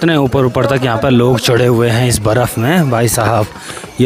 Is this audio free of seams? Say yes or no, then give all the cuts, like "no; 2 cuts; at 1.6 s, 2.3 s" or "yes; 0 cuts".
yes; 0 cuts